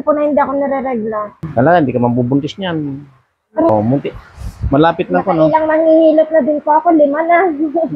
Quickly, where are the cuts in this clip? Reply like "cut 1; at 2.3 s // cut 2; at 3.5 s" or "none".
cut 1; at 1.4 s // cut 2; at 3.7 s